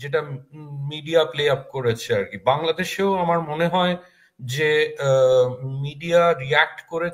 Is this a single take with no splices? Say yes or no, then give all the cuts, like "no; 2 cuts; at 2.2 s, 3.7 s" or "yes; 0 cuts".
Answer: yes; 0 cuts